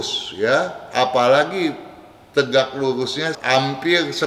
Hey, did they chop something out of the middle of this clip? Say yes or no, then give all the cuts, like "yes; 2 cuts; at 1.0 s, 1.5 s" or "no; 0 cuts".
no; 0 cuts